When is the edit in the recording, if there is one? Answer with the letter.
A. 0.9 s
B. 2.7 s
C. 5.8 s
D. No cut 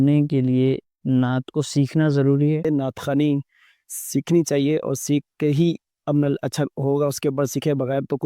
B